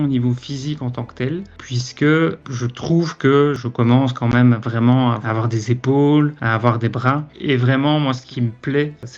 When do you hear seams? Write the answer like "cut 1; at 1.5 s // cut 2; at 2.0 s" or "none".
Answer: cut 1; at 2.4 s // cut 2; at 3.6 s // cut 3; at 5.2 s // cut 4; at 7.3 s // cut 5; at 8.2 s